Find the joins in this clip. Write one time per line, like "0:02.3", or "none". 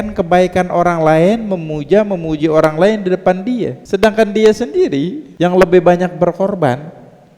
0:03.8
0:05.2